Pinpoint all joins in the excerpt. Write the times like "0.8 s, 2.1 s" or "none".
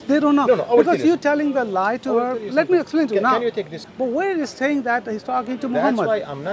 3.8 s